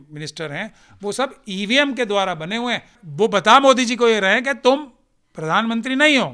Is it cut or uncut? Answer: cut